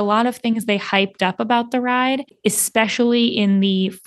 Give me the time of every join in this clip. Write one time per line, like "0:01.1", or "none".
0:02.3